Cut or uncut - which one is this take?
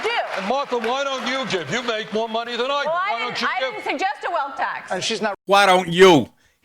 cut